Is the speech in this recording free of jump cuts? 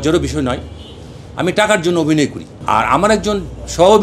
no; 1 cut; at 2.5 s

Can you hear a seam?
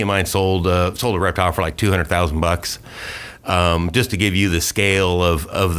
no; 0 cuts

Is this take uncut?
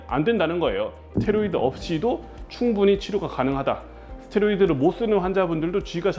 no; 1 cut; at 1.0 s

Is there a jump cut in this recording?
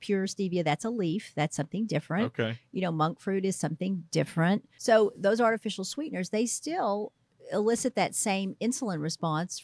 yes; 1 cut; at 4.7 s

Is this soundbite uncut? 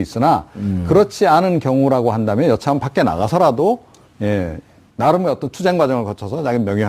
no; 1 cut; at 3.5 s

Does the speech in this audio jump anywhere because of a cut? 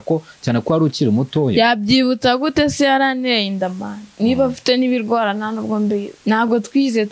yes; 1 cut; at 6.1 s

